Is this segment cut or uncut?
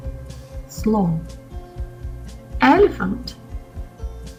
uncut